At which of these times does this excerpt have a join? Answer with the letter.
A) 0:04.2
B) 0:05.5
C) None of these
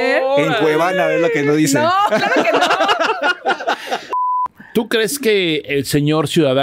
A